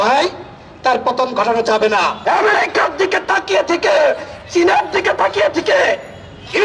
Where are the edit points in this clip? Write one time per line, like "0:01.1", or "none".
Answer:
0:02.2